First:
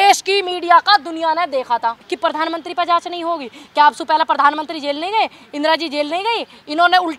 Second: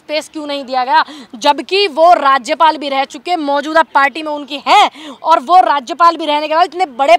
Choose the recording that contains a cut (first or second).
first